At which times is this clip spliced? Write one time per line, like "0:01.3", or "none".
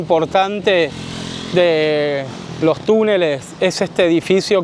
none